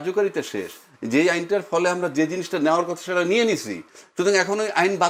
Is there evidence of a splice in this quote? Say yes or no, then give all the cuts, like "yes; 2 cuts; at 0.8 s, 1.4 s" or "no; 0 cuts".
no; 0 cuts